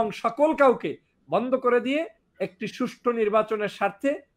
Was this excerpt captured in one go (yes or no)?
yes